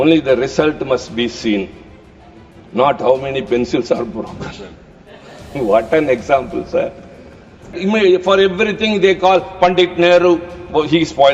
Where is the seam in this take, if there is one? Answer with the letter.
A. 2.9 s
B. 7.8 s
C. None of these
B